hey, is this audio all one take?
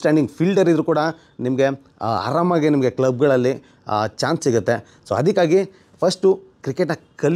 yes; 0 cuts

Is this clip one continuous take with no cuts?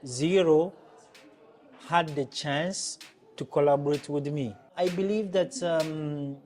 no; 1 cut; at 4.7 s

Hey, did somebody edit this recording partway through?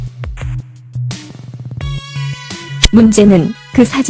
yes; 1 cut; at 1.3 s

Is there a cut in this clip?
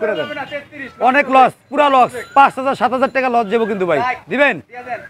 no; 0 cuts

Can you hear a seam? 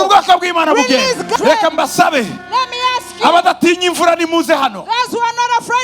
yes; 1 cut; at 1.3 s

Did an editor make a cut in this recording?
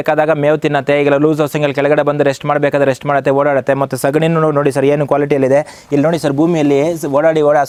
no; 0 cuts

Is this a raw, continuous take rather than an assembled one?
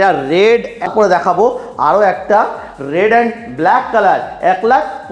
no; 1 cut; at 0.9 s

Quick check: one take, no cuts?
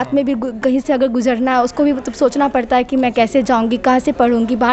yes; 0 cuts

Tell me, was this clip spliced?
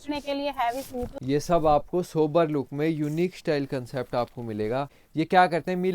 yes; 2 cuts; at 1.2 s, 5.0 s

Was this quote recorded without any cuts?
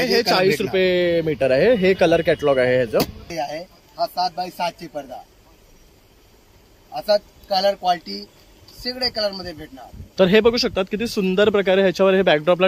no; 1 cut; at 3.2 s

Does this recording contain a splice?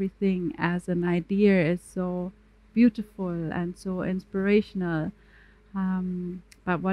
no; 0 cuts

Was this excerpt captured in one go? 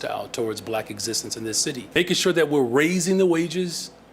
no; 1 cut; at 2.0 s

